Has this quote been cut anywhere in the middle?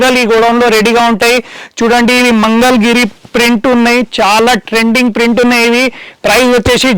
no; 0 cuts

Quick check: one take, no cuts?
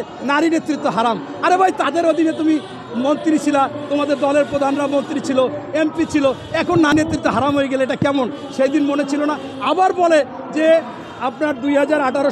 yes; 0 cuts

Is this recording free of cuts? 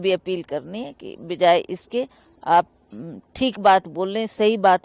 yes; 0 cuts

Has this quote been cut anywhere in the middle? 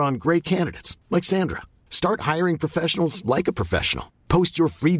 no; 0 cuts

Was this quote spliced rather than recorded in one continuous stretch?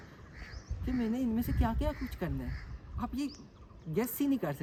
no; 0 cuts

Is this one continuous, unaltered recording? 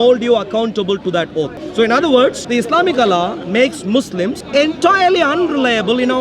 no; 3 cuts; at 1.6 s, 2.4 s, 4.4 s

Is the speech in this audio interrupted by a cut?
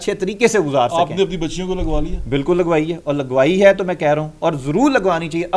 no; 0 cuts

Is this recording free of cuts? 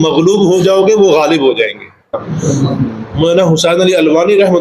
no; 1 cut; at 2.1 s

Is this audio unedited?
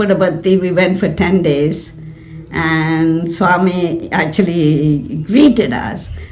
yes; 0 cuts

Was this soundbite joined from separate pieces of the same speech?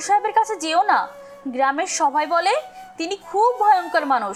no; 0 cuts

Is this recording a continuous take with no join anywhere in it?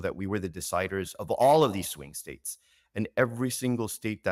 yes; 0 cuts

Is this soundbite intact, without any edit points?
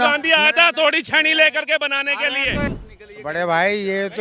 no; 1 cut; at 2.7 s

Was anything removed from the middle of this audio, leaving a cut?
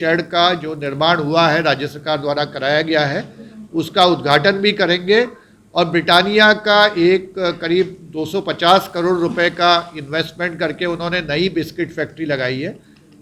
no; 0 cuts

